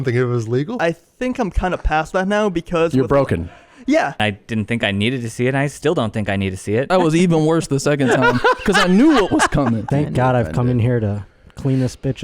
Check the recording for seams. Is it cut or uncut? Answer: cut